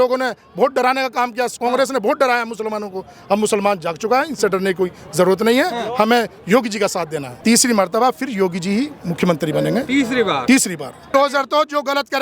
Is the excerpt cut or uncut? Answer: cut